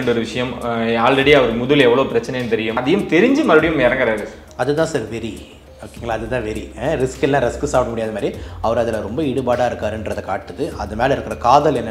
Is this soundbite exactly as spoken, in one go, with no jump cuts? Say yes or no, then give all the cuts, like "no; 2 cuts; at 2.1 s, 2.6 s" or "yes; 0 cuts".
no; 1 cut; at 2.7 s